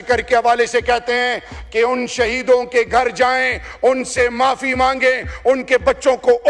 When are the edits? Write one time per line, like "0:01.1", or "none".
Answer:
none